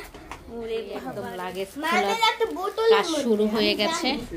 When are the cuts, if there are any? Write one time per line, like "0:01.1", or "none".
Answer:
0:01.0